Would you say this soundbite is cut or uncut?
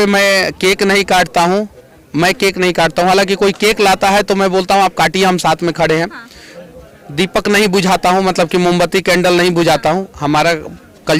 uncut